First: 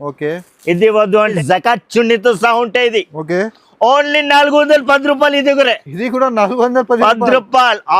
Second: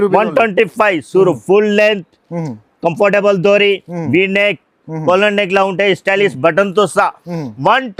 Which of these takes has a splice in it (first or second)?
first